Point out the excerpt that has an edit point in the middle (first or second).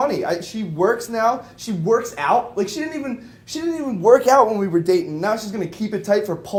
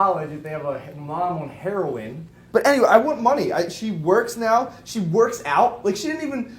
second